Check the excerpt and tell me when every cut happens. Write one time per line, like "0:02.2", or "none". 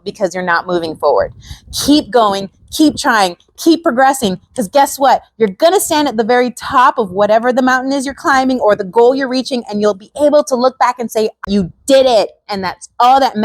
0:11.5